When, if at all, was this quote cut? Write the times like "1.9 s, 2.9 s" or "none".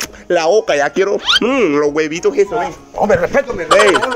none